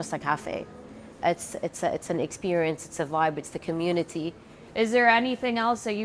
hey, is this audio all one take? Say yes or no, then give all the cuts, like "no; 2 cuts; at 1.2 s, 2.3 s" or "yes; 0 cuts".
no; 1 cut; at 4.5 s